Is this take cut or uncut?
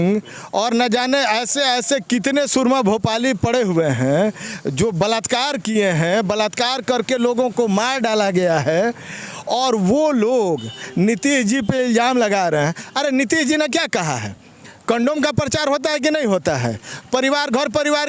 uncut